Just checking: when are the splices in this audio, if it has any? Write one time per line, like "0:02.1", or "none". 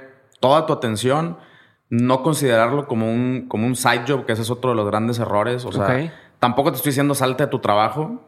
none

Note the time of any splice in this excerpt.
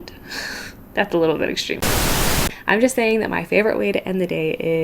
0:02.2

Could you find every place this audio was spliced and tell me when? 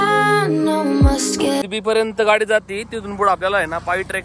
0:01.6

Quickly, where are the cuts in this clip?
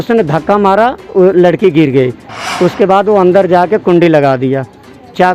none

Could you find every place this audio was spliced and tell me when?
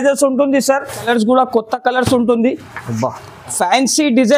0:01.0

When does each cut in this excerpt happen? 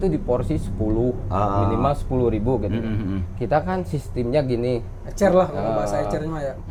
none

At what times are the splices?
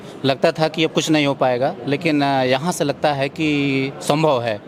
none

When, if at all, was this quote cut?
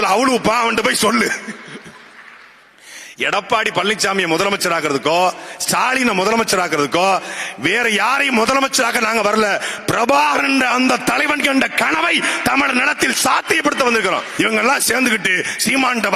0:14.3

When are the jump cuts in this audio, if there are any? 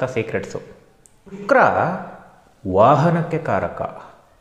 0:01.4

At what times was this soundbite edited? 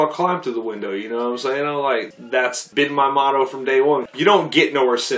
0:02.1
0:04.1

